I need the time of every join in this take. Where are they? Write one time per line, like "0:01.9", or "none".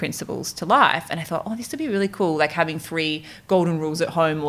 none